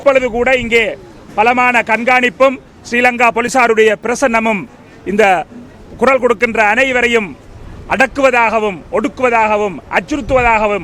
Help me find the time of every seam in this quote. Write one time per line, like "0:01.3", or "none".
none